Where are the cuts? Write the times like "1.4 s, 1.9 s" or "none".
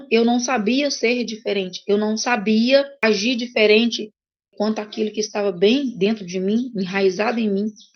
3.0 s, 4.5 s